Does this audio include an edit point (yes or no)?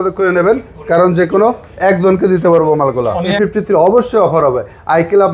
yes